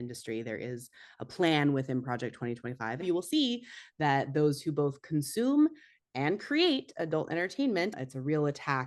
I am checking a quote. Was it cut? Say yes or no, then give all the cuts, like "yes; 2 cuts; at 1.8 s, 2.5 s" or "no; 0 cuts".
yes; 2 cuts; at 3.0 s, 8.0 s